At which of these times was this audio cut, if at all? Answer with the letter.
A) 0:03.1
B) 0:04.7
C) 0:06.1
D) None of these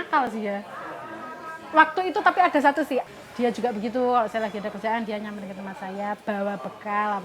A